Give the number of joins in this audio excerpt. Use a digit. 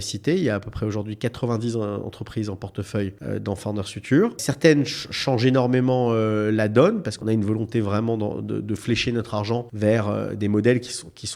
4